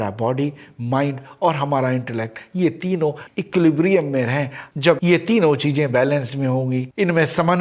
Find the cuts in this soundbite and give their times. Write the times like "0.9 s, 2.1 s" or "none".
none